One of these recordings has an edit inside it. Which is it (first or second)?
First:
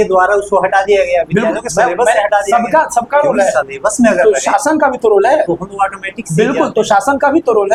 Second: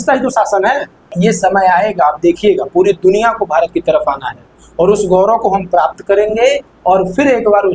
second